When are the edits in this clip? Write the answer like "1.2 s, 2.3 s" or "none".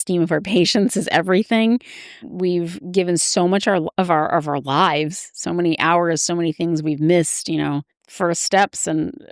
2.2 s, 8.0 s